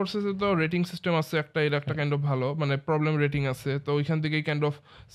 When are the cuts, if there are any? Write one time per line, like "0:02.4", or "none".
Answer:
none

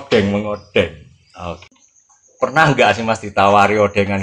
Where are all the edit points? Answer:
0:01.6

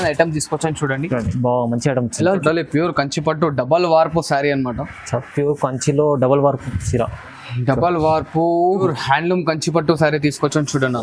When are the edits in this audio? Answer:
0:02.4
0:08.8

